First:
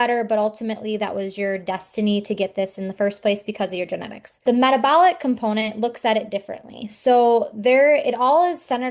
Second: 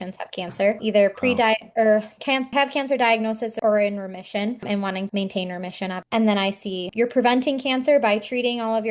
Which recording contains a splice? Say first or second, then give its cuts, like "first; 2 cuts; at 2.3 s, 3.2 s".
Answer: second; 5 cuts; at 0.8 s, 2.5 s, 3.5 s, 4.6 s, 6.8 s